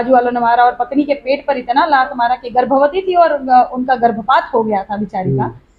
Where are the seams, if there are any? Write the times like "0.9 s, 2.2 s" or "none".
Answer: none